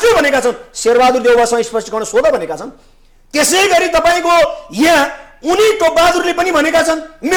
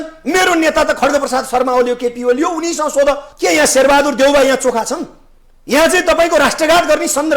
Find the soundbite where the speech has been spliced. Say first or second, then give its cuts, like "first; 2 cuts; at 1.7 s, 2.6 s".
second; 1 cut; at 3.3 s